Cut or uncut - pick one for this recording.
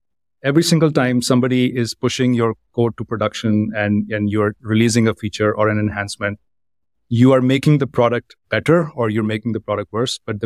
uncut